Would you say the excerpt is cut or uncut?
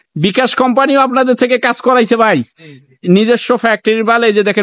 uncut